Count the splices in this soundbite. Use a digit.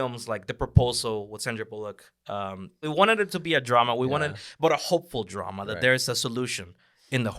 1